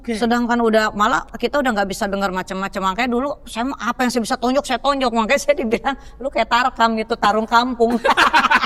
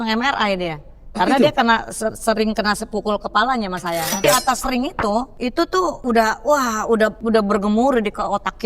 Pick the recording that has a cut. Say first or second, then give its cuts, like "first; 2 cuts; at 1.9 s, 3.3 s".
second; 3 cuts; at 4.2 s, 5.8 s, 7.2 s